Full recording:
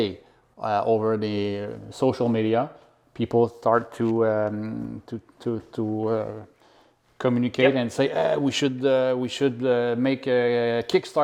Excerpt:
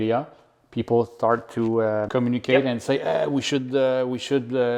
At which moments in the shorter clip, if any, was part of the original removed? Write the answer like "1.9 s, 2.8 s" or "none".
2.1 s

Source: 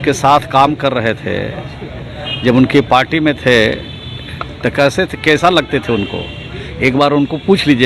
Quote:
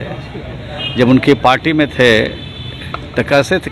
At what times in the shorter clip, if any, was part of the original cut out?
none

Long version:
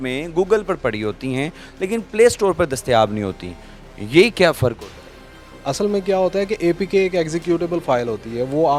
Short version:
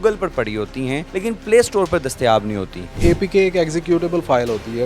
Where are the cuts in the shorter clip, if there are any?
1.1 s, 3.0 s

